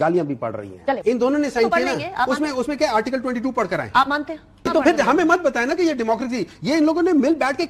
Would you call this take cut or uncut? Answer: cut